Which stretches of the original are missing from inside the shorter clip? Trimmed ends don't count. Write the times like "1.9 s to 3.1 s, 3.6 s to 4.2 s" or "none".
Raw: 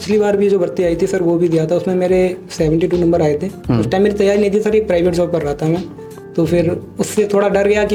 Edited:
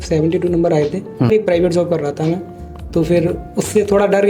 3.8 s to 4.7 s